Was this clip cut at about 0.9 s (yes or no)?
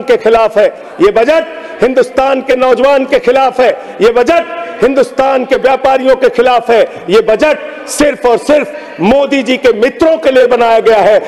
no